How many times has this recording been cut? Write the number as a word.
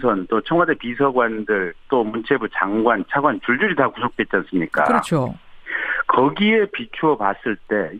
zero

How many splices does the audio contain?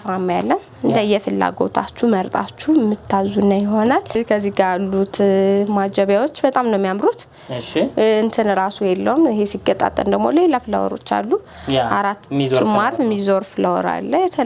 zero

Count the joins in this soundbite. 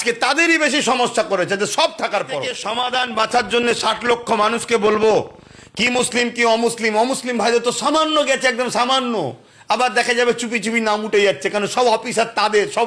one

